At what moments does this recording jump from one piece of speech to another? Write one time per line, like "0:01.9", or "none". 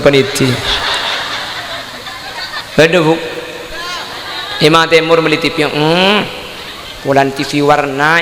0:02.6